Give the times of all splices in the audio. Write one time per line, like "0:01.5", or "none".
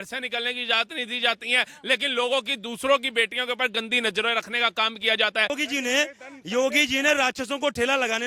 0:05.5

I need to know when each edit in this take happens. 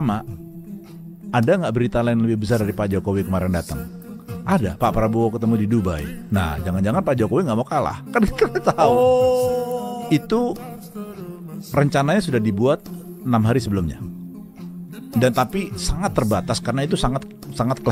0:10.0

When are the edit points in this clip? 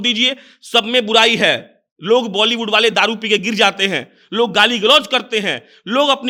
none

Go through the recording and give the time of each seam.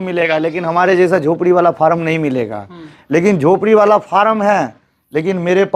none

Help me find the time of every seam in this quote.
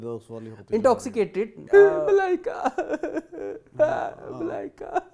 0:01.6

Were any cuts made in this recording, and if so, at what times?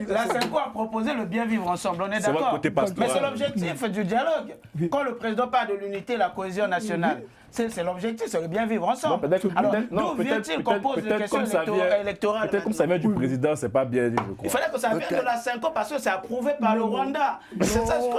none

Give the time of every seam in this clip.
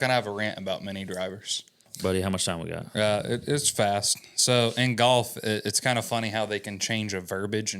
0:01.9

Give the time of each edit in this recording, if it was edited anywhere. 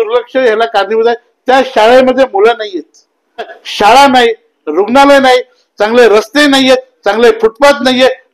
0:03.6

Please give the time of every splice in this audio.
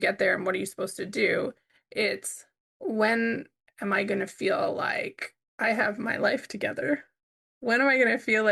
none

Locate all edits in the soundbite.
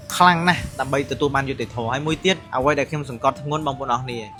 none

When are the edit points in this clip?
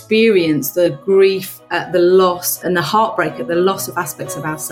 0:00.9
0:02.5

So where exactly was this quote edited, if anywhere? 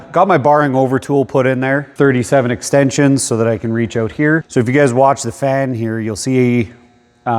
0:01.9
0:04.5

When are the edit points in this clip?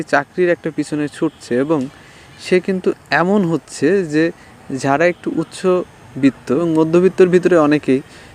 0:06.6

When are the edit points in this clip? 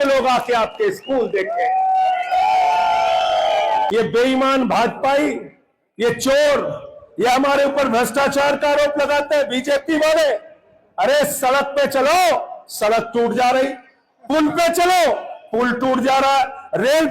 0:03.9

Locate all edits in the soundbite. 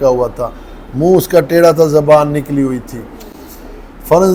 none

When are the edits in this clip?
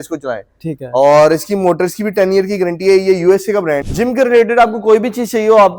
none

